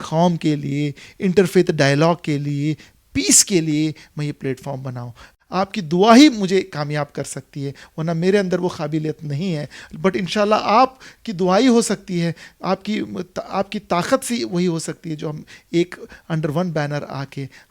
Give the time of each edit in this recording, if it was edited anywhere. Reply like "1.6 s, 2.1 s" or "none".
5.4 s